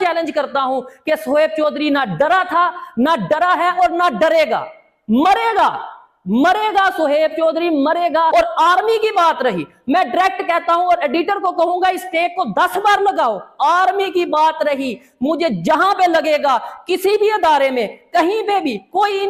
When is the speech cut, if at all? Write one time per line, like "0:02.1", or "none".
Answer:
0:08.3